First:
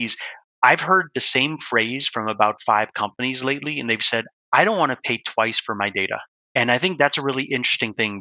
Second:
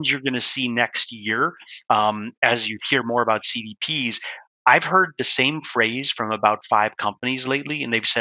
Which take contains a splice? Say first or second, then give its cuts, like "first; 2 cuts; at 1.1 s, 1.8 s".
first; 1 cut; at 6.4 s